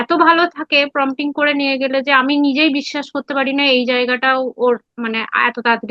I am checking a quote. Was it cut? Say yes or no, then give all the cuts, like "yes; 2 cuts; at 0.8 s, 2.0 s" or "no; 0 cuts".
no; 0 cuts